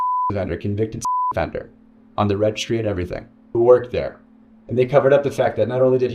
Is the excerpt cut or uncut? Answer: uncut